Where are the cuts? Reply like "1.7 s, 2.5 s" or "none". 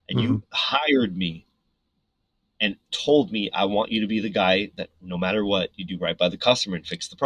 none